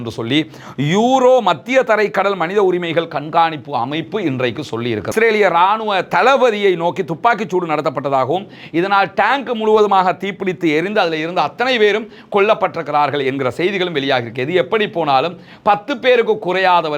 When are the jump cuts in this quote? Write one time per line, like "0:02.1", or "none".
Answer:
0:05.1